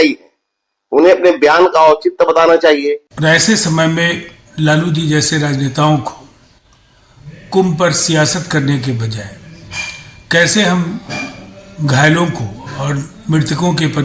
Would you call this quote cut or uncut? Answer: uncut